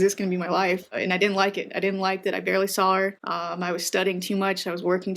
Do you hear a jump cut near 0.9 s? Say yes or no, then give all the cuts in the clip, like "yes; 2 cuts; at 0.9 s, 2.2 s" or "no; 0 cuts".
yes; 2 cuts; at 0.9 s, 3.2 s